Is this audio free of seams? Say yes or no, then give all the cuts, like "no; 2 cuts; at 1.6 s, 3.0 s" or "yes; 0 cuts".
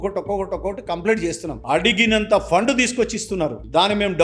no; 1 cut; at 1.6 s